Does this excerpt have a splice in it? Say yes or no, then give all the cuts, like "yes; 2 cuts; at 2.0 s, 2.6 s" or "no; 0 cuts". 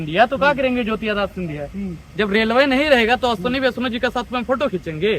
no; 0 cuts